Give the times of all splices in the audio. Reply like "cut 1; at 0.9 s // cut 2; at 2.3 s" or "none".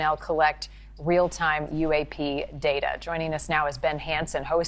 cut 1; at 3.6 s